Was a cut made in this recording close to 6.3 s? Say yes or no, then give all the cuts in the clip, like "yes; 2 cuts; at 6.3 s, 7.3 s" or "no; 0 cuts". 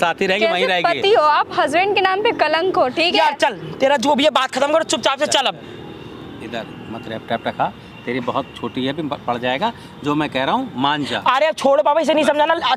no; 0 cuts